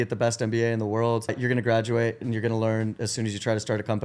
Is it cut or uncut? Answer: cut